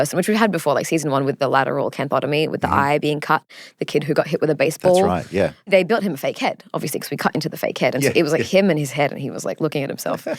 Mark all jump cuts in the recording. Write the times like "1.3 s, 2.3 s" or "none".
5.7 s